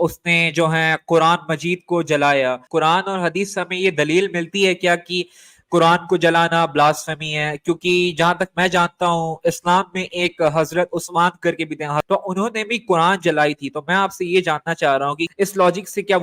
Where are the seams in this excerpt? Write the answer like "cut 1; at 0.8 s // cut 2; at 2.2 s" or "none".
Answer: cut 1; at 2.6 s // cut 2; at 12.0 s // cut 3; at 15.2 s